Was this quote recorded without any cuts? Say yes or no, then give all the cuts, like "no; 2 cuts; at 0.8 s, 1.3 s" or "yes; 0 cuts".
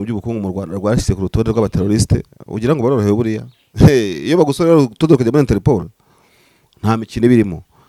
yes; 0 cuts